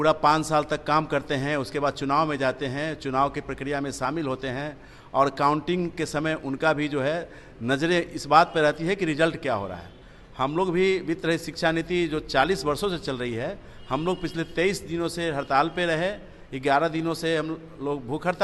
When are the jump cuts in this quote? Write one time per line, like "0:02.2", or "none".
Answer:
none